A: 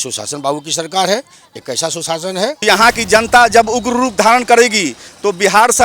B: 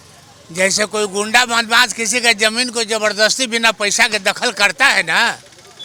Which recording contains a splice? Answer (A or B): A